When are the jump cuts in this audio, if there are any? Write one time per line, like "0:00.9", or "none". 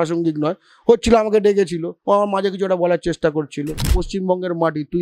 0:04.0